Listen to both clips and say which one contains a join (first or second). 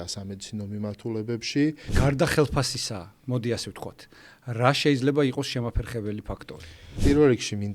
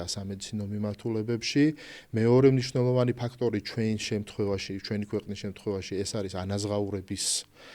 first